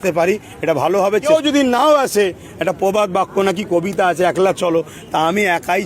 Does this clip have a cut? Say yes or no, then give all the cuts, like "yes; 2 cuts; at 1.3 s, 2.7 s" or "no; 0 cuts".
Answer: yes; 1 cut; at 1.2 s